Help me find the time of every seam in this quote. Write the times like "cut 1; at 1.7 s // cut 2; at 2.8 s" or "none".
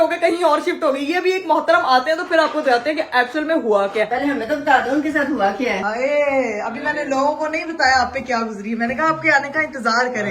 cut 1; at 4.1 s // cut 2; at 5.8 s